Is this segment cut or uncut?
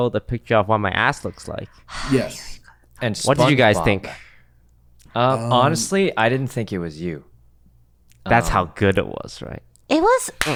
uncut